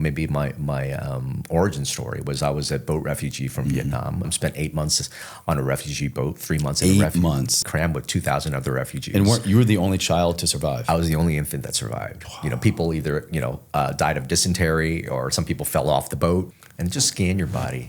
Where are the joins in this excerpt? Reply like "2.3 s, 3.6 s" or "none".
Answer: 4.3 s, 7.6 s, 16.6 s